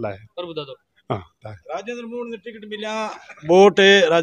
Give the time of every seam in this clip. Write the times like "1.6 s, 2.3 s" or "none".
none